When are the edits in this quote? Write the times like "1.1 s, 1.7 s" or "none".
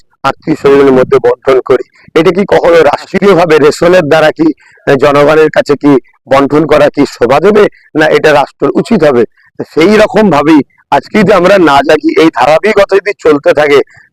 none